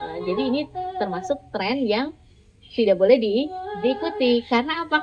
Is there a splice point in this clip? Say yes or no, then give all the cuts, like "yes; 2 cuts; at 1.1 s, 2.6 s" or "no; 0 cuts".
no; 0 cuts